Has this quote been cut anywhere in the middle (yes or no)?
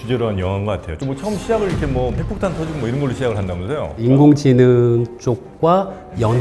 yes